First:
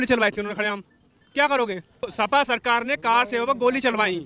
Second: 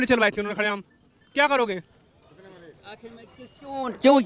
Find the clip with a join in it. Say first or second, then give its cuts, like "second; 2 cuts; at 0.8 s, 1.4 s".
first; 1 cut; at 2.1 s